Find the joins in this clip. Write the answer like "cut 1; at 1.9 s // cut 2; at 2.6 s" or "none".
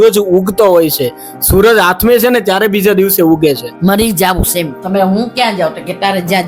cut 1; at 3.7 s